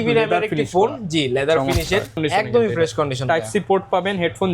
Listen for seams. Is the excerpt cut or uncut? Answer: cut